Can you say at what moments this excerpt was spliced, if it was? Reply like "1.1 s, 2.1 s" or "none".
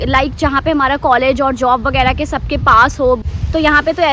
3.2 s